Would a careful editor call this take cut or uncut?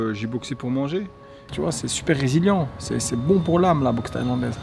cut